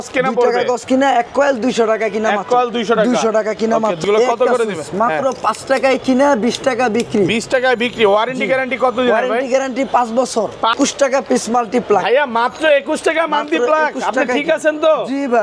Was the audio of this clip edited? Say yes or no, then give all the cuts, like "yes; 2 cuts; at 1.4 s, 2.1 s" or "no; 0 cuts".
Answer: yes; 2 cuts; at 4.0 s, 10.7 s